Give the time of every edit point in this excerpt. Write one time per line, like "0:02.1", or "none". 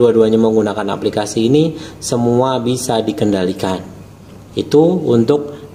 none